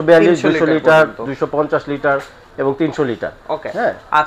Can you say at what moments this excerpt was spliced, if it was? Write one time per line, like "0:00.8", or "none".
none